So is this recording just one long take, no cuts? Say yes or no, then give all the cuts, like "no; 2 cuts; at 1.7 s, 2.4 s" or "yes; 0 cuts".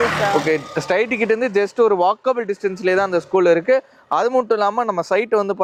yes; 0 cuts